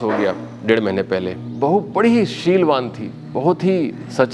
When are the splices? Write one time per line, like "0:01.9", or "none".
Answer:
0:01.4